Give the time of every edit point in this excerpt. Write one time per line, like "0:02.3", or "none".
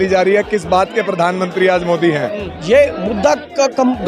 0:02.5